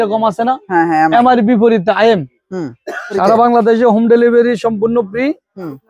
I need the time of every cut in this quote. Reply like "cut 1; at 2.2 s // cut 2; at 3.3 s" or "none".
cut 1; at 3.2 s